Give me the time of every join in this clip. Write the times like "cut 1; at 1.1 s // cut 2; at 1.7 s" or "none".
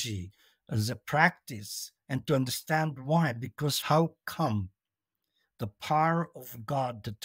cut 1; at 3.8 s